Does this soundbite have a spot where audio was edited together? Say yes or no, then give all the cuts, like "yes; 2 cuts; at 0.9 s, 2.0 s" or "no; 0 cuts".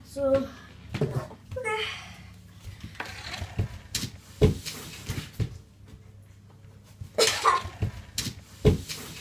yes; 1 cut; at 7.7 s